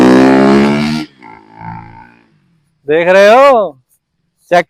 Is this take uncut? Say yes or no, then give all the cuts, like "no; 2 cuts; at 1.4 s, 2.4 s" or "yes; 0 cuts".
yes; 0 cuts